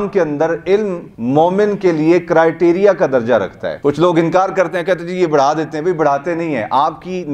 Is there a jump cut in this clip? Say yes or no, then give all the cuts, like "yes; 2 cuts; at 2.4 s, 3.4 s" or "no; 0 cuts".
yes; 1 cut; at 3.7 s